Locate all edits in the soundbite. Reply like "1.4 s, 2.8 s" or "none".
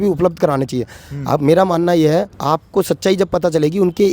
2.3 s